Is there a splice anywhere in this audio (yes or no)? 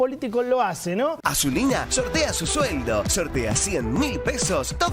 yes